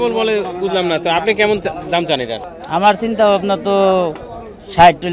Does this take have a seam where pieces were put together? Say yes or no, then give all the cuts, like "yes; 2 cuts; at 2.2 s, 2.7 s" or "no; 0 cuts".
yes; 1 cut; at 2.4 s